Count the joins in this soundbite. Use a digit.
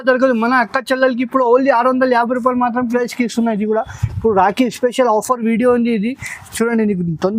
1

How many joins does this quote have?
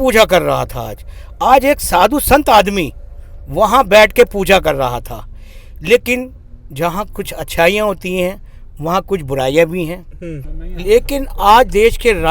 0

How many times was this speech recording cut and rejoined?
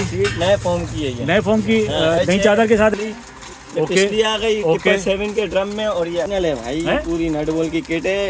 2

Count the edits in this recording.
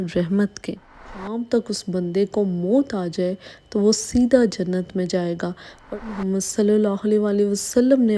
2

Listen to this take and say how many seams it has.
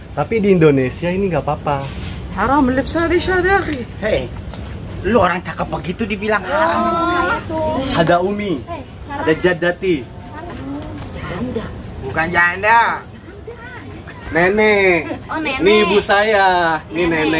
1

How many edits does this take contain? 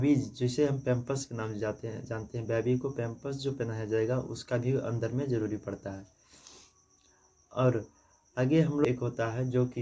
1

